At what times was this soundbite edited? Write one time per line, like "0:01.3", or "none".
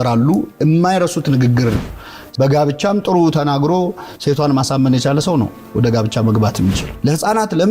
0:01.9
0:06.9